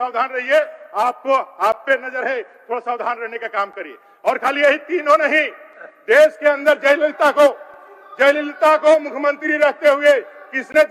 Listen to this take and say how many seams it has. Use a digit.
0